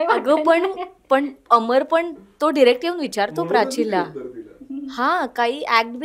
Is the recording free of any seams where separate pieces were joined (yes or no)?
yes